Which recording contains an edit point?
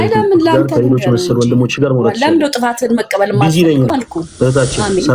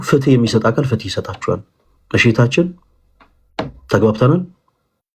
first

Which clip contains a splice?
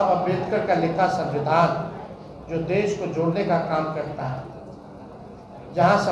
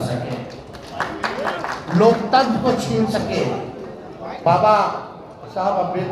second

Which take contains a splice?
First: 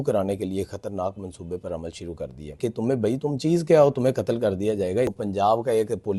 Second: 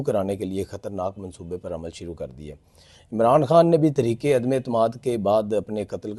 first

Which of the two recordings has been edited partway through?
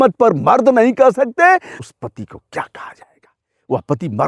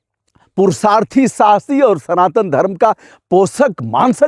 first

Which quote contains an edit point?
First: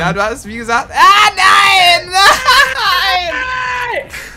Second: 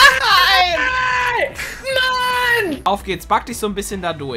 second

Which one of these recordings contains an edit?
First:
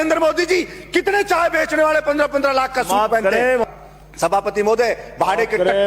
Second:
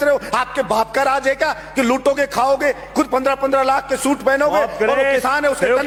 first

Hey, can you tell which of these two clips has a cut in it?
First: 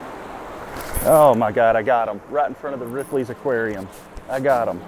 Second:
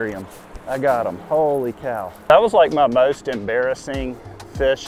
second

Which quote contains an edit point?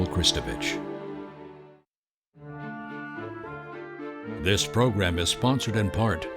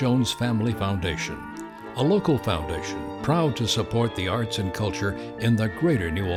first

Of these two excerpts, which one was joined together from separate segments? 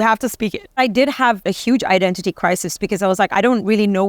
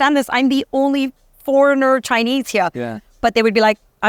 first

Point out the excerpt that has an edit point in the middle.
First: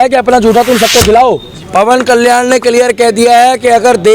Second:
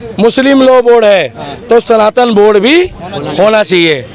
first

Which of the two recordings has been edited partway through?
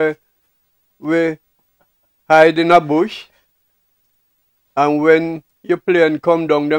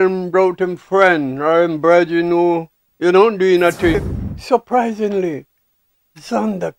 second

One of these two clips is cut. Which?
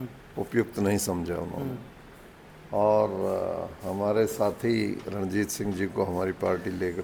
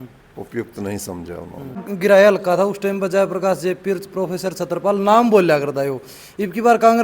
second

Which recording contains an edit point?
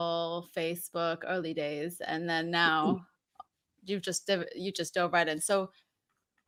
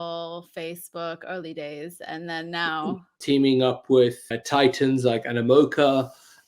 second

